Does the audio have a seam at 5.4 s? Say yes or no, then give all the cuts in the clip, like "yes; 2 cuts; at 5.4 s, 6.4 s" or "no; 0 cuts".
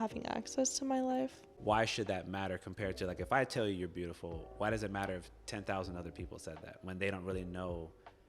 no; 1 cut; at 1.5 s